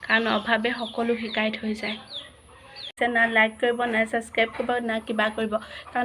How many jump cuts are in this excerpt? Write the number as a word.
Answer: one